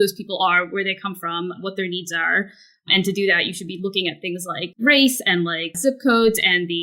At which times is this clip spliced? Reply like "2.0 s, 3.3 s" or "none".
4.7 s, 5.7 s